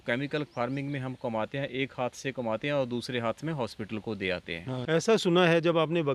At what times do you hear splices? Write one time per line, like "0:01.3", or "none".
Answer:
0:04.7